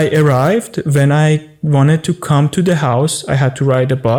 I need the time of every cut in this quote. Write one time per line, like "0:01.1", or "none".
none